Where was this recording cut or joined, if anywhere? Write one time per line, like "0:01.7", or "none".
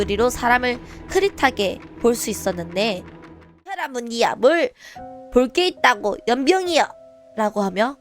0:03.9

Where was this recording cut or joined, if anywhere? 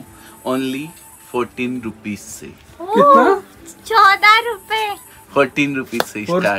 none

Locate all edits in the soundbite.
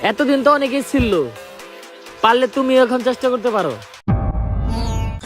0:04.0

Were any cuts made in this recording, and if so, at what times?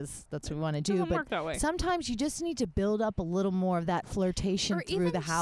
none

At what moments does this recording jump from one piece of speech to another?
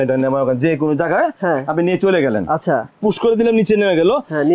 0:02.9

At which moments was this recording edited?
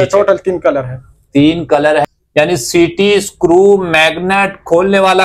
0:02.0

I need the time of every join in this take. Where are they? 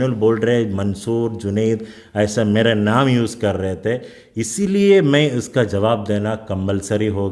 none

